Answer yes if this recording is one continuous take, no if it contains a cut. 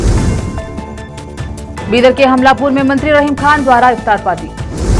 yes